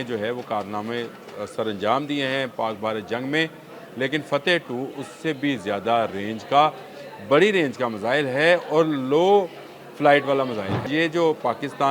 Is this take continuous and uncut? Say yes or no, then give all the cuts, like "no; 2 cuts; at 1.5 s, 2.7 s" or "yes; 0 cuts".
no; 1 cut; at 10.9 s